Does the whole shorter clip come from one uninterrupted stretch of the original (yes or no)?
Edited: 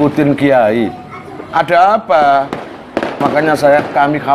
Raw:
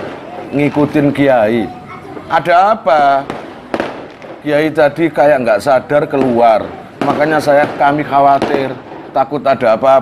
no